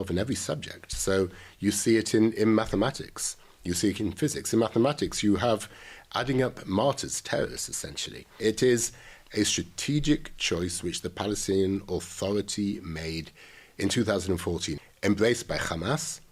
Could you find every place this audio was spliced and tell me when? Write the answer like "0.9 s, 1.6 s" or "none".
8.3 s, 14.8 s